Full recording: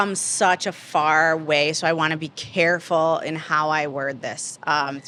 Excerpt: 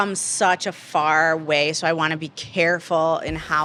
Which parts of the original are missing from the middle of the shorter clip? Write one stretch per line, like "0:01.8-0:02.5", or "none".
none